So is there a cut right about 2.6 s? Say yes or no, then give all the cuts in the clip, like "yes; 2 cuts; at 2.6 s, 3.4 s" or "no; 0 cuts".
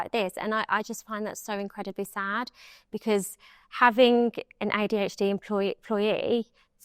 no; 0 cuts